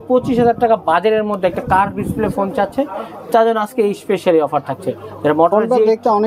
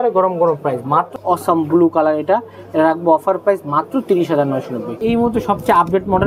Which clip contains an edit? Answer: second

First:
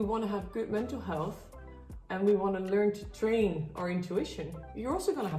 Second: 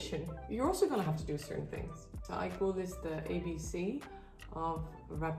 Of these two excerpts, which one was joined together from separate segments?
second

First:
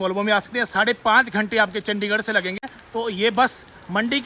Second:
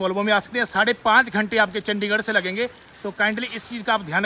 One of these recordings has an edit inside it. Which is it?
first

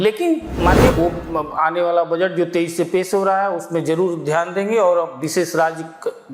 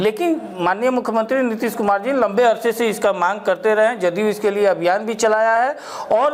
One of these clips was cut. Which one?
first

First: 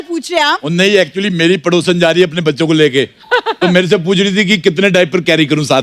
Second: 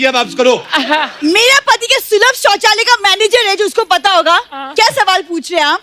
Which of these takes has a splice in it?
second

